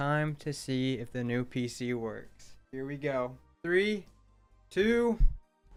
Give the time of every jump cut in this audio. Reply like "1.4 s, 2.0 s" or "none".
none